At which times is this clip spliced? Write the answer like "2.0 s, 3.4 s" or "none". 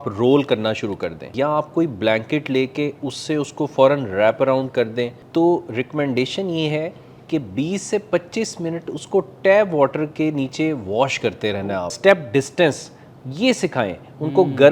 1.2 s, 5.2 s, 11.9 s